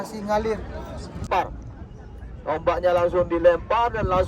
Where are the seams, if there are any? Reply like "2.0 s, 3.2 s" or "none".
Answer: 1.2 s